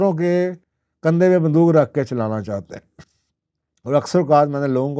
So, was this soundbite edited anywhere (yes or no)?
no